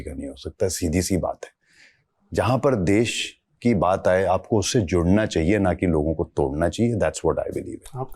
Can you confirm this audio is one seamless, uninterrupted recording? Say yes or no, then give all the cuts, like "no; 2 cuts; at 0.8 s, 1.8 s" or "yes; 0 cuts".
yes; 0 cuts